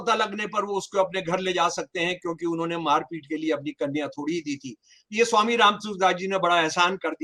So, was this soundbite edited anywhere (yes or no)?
no